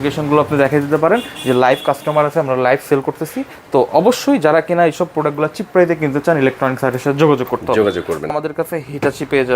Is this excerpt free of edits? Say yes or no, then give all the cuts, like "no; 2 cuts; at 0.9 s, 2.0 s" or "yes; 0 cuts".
no; 1 cut; at 8.3 s